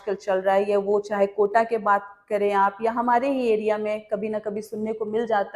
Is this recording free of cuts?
yes; 0 cuts

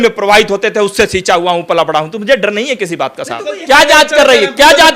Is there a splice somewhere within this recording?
yes; 1 cut; at 3.5 s

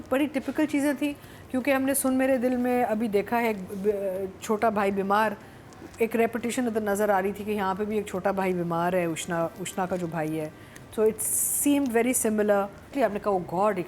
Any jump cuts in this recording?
yes; 1 cut; at 12.9 s

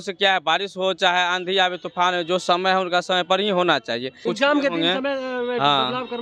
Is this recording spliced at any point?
yes; 1 cut; at 4.2 s

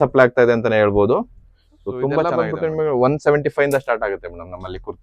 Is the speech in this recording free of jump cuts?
no; 1 cut; at 2.3 s

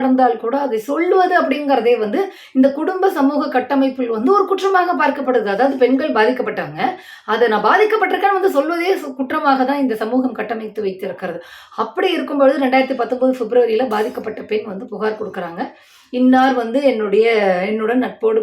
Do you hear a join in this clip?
no; 0 cuts

